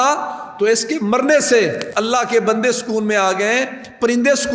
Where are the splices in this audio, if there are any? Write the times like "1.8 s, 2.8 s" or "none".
1.8 s